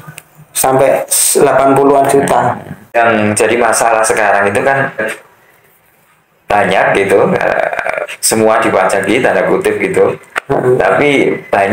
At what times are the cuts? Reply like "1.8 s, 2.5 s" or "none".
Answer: 3.0 s, 5.0 s